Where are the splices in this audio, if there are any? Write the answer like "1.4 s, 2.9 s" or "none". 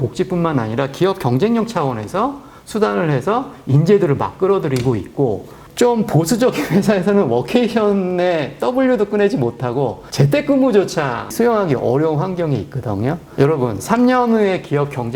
13.2 s